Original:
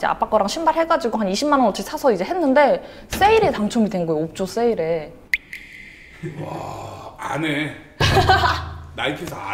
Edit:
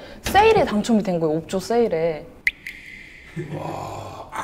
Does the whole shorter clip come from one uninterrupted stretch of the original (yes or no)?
yes